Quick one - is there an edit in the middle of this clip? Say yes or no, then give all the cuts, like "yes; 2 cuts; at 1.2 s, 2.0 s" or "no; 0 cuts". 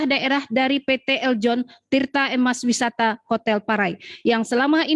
no; 0 cuts